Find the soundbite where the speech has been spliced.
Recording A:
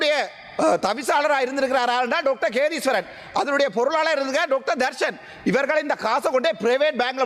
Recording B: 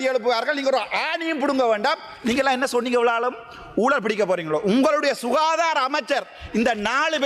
B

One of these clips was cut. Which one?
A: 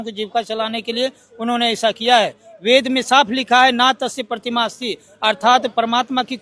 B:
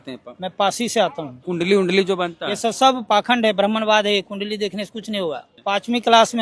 B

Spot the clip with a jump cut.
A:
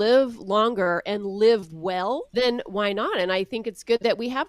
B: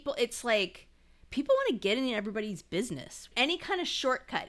A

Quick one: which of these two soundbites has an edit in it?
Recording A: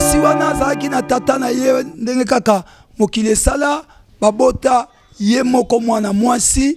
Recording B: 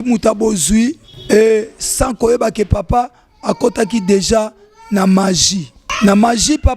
B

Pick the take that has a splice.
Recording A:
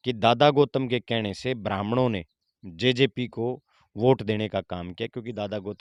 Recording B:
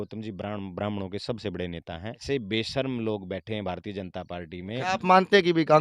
B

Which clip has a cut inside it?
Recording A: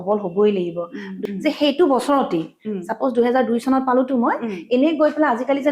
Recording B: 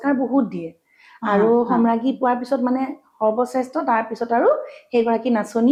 A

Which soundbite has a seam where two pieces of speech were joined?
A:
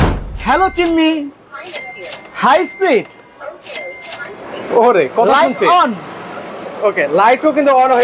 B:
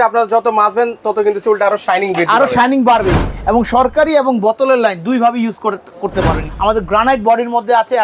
B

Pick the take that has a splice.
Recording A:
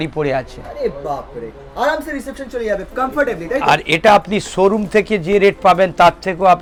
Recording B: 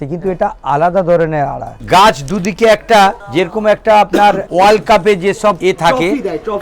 B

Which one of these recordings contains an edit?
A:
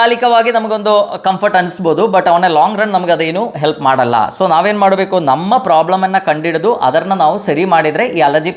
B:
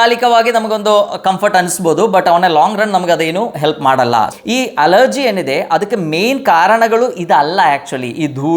B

